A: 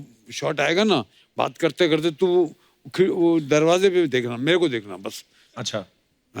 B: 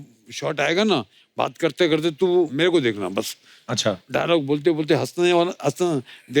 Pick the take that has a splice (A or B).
B